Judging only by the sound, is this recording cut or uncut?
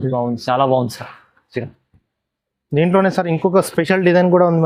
uncut